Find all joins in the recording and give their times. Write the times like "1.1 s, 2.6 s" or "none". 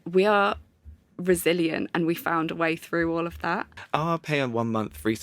3.8 s